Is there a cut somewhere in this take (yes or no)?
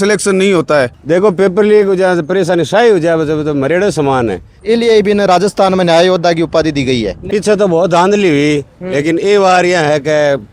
yes